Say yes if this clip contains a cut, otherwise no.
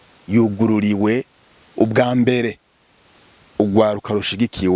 no